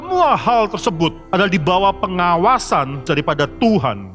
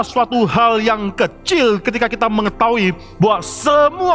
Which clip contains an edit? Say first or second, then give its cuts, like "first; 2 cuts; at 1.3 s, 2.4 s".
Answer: first; 2 cuts; at 1.2 s, 3.0 s